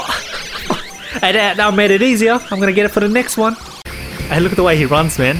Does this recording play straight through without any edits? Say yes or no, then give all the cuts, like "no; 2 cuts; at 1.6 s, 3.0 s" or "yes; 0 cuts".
no; 1 cut; at 3.5 s